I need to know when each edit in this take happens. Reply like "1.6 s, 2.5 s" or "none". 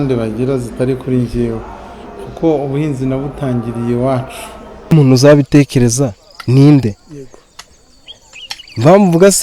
4.9 s